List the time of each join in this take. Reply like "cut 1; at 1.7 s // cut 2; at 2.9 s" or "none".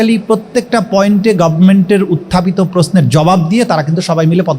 none